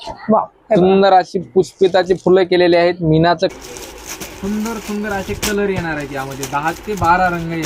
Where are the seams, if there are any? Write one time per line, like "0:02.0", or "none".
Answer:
0:03.5